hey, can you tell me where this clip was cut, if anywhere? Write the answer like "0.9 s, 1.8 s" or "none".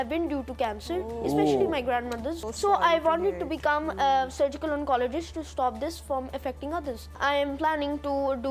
2.4 s, 7.2 s